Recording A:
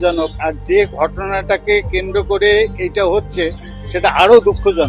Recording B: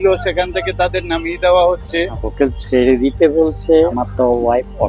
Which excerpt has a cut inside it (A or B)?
B